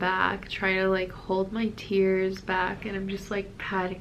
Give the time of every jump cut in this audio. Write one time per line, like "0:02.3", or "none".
none